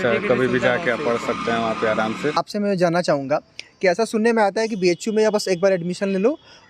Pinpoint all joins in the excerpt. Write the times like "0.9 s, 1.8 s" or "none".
2.3 s